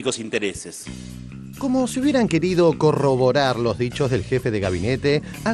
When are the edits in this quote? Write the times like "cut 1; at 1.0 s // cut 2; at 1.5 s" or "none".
none